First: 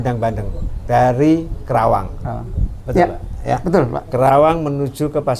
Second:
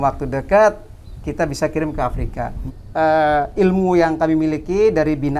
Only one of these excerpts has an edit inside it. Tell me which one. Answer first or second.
second